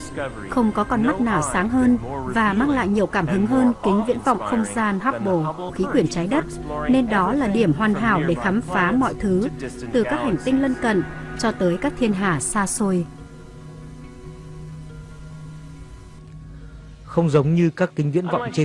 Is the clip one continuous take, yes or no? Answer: yes